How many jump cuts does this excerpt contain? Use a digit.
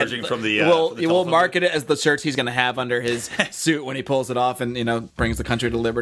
1